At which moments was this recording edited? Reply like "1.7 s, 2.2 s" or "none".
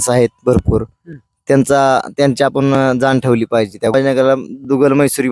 3.9 s